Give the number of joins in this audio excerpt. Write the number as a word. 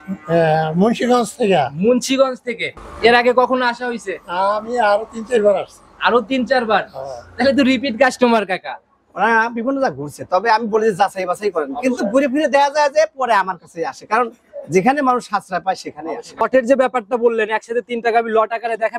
two